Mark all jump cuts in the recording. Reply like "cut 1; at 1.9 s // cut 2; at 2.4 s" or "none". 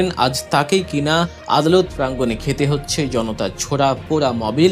cut 1; at 1.4 s